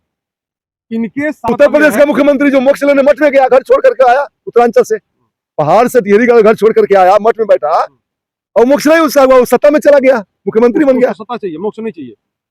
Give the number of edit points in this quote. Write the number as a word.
one